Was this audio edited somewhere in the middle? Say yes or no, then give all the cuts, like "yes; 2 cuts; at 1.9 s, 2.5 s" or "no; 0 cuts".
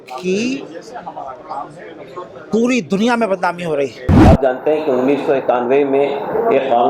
yes; 1 cut; at 4.1 s